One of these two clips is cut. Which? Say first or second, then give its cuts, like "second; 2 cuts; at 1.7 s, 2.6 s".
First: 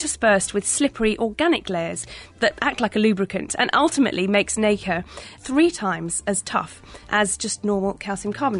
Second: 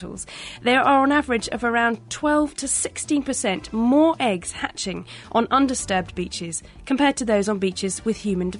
first; 3 cuts; at 2.3 s, 5.4 s, 7.1 s